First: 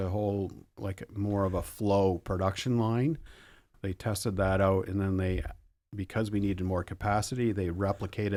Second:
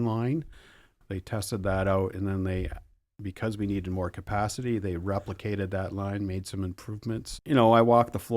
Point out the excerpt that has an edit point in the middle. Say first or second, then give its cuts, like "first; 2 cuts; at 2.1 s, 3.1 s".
second; 1 cut; at 7.3 s